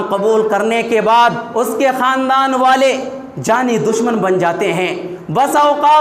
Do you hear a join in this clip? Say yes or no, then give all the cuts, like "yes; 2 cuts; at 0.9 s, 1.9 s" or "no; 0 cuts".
yes; 1 cut; at 1.4 s